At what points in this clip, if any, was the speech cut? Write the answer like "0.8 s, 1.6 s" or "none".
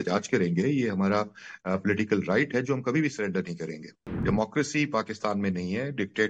4.2 s

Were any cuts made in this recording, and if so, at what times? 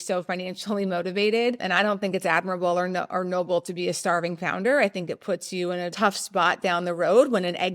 1.6 s, 5.9 s

